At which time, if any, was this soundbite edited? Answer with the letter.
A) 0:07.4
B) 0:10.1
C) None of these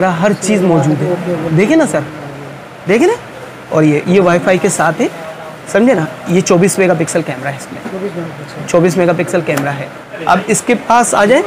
B